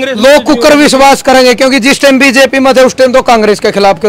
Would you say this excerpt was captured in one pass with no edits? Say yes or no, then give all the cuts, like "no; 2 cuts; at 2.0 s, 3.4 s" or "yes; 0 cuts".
yes; 0 cuts